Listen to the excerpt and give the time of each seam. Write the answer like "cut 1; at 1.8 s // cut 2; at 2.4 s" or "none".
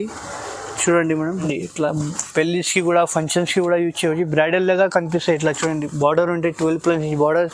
cut 1; at 1.4 s